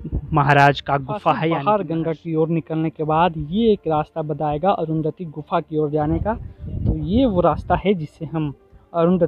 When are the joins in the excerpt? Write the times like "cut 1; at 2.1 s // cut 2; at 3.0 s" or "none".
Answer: cut 1; at 1.6 s